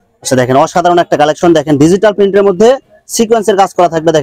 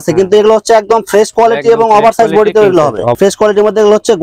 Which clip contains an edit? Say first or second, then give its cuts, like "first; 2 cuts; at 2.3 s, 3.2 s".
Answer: second; 1 cut; at 3.1 s